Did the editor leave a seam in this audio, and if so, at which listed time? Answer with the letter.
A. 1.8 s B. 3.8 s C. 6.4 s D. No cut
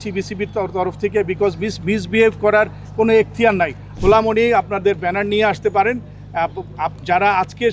B